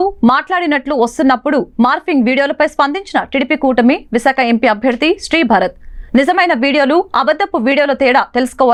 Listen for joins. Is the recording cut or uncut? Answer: uncut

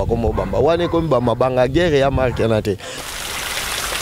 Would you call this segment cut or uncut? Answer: cut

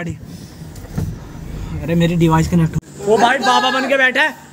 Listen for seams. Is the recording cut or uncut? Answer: cut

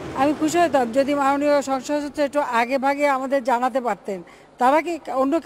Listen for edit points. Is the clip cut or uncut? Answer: uncut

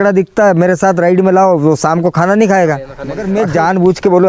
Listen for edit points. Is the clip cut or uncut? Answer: cut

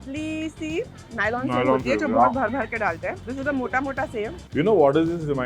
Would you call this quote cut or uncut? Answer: cut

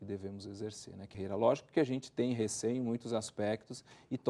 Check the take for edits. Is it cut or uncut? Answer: cut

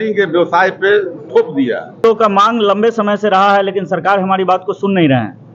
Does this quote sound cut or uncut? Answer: cut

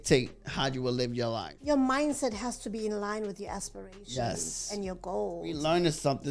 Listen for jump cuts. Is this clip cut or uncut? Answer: cut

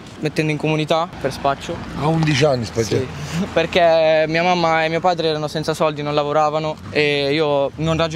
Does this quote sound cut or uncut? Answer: cut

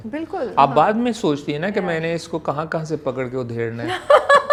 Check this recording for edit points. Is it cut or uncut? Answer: uncut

